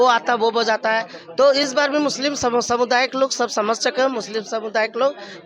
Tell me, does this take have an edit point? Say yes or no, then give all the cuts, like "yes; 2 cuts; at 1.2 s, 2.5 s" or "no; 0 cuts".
no; 0 cuts